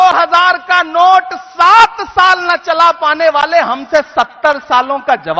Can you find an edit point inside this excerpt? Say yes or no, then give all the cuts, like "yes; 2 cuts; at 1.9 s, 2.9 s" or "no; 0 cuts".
no; 0 cuts